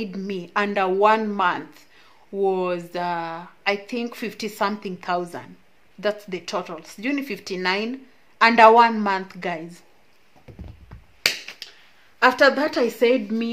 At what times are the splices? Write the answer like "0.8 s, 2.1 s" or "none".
none